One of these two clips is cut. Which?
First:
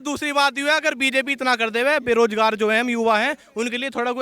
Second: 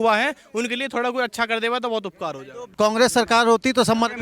second; 1 cut; at 2.7 s

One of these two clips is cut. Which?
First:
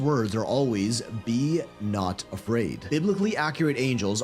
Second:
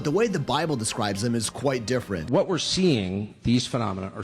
second; 1 cut; at 2.2 s

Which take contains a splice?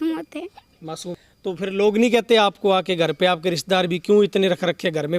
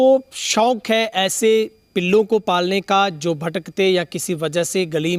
first; 1 cut; at 1.3 s

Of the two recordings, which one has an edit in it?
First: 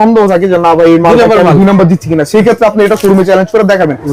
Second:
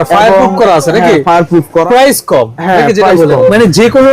second; 2 cuts; at 1.9 s, 3.4 s

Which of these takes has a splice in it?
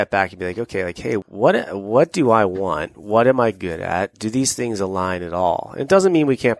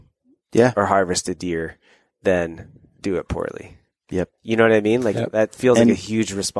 first; 1 cut; at 1.2 s

